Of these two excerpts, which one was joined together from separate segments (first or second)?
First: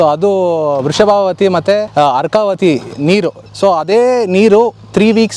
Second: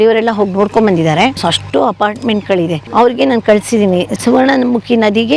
first